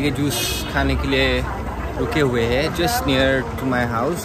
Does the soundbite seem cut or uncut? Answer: uncut